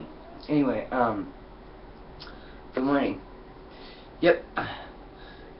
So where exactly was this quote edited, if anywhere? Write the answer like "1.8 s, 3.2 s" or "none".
none